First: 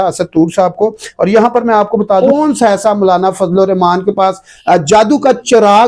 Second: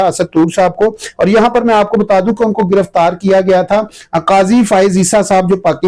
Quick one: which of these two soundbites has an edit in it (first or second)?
first